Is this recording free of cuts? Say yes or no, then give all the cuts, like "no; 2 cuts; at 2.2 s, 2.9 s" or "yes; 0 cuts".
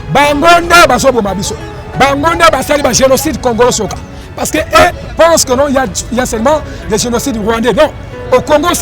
yes; 0 cuts